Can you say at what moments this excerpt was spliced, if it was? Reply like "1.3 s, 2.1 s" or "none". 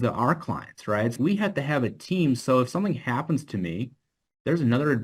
1.2 s